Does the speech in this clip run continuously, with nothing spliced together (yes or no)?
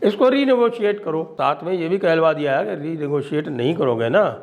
no